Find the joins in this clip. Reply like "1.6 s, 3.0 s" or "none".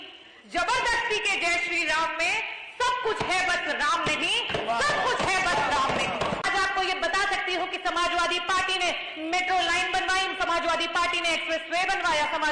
6.5 s

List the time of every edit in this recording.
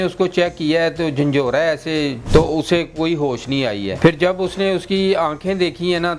2.2 s, 3.9 s

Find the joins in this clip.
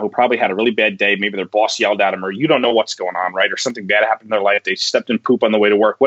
none

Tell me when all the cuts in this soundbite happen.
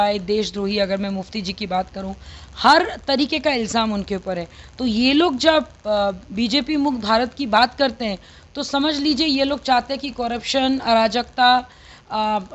none

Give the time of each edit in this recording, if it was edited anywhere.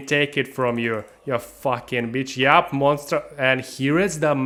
none

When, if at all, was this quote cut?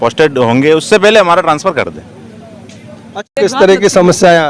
3.3 s

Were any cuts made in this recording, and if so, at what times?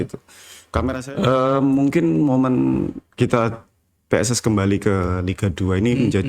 1.0 s

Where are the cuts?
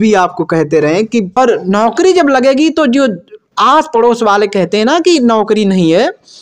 1.4 s

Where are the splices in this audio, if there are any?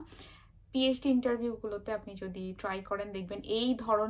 none

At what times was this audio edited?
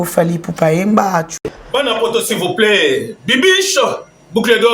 1.3 s

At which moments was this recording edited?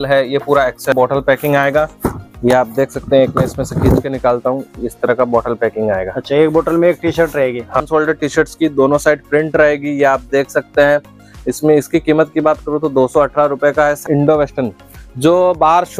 0.9 s, 7.8 s, 14.1 s

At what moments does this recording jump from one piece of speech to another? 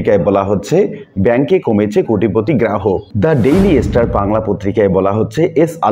3.1 s

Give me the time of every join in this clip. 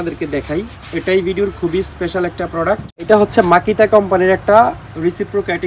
3.1 s

